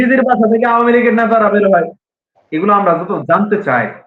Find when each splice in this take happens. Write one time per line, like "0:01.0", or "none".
none

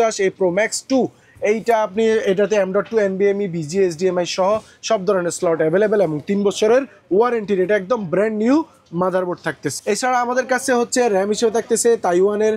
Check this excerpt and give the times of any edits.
none

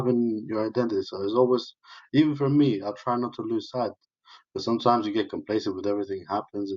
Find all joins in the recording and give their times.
none

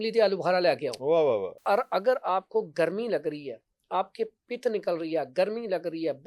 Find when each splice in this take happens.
0:01.5

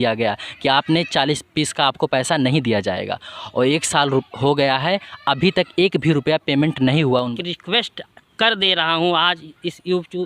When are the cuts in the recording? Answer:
0:07.3

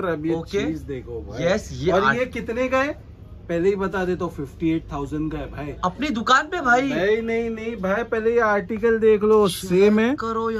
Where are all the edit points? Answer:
none

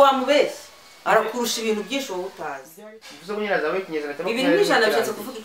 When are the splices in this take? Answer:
0:02.7

